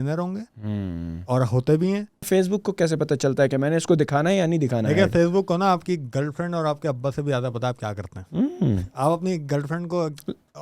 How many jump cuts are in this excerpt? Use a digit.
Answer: 1